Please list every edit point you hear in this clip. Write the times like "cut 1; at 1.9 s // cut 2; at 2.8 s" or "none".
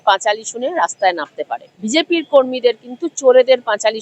cut 1; at 1.7 s